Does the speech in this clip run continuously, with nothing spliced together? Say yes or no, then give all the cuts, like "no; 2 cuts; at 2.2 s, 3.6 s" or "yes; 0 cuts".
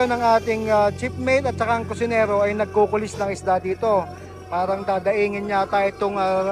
yes; 0 cuts